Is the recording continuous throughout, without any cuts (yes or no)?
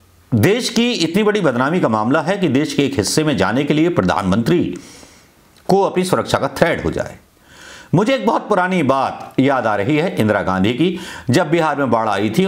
yes